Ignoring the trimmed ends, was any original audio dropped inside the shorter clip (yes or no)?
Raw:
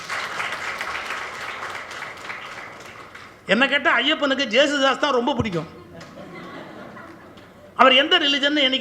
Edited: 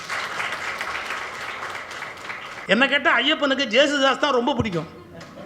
yes